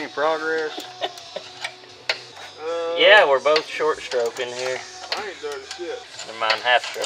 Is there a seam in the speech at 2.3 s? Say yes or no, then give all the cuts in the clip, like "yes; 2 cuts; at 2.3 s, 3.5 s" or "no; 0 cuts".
yes; 2 cuts; at 2.3 s, 6.1 s